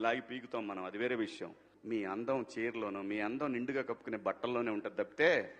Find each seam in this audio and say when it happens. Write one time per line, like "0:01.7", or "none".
0:01.6